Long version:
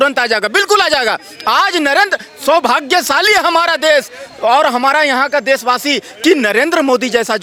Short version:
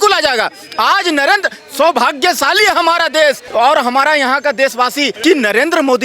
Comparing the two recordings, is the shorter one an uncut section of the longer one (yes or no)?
no